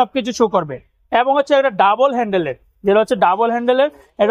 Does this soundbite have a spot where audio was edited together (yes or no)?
no